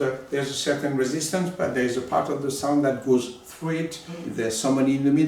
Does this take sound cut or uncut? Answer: cut